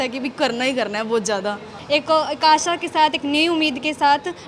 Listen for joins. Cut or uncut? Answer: cut